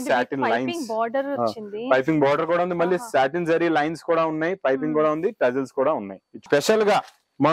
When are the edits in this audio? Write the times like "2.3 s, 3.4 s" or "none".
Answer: 6.4 s

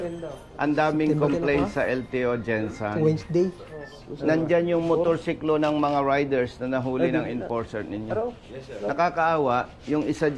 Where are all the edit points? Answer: none

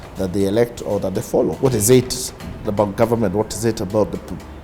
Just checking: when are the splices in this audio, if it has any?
1.6 s

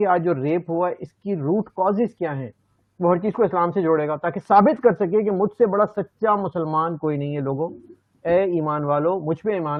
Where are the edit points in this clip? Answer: none

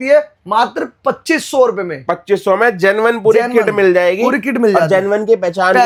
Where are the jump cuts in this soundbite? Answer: none

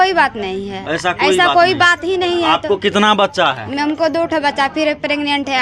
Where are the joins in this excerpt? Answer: none

